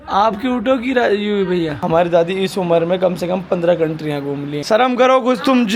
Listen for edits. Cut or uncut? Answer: cut